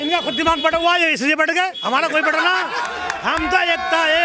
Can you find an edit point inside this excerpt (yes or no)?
no